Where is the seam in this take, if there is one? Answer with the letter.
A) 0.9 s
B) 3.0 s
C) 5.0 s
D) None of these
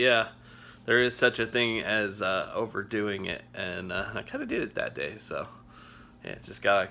D